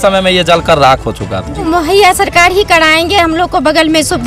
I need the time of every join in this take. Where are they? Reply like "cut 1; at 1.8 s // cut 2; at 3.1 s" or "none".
cut 1; at 1.6 s